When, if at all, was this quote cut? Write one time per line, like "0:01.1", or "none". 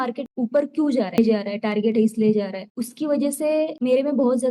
0:01.2